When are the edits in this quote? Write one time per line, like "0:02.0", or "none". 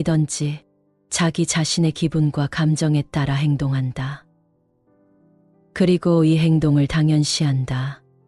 0:04.2
0:05.7